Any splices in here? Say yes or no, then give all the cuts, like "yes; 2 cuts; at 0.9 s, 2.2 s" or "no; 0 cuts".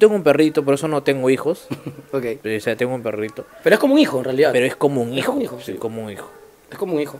no; 0 cuts